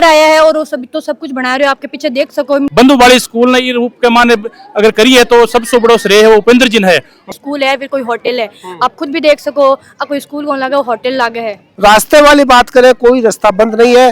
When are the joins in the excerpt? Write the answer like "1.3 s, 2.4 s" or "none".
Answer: 2.7 s, 7.2 s, 11.6 s